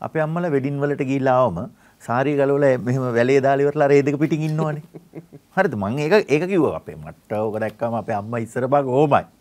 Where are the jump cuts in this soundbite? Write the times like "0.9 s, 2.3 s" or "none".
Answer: none